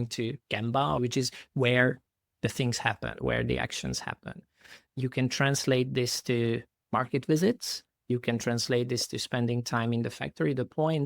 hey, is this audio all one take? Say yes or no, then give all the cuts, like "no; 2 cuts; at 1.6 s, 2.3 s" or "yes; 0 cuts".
no; 1 cut; at 1.0 s